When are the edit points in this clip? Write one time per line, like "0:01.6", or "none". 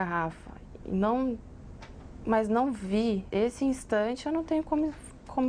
0:03.2